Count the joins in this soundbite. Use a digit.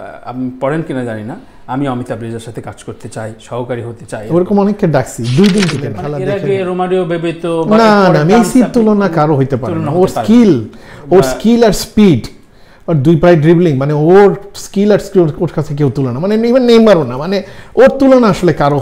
1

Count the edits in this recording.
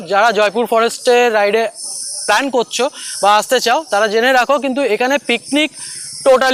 0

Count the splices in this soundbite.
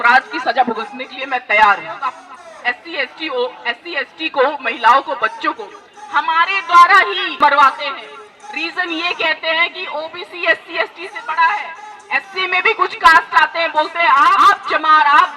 3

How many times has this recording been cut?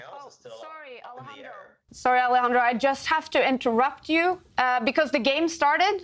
1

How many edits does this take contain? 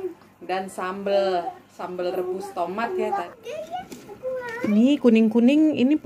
1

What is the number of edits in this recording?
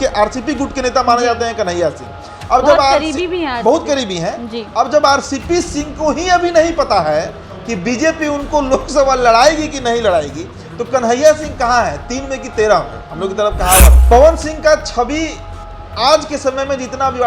1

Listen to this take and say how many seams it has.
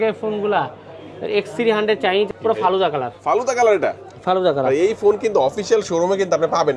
1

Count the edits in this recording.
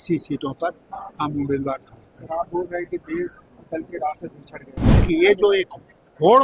1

